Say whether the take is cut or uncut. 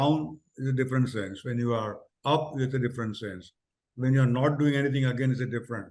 uncut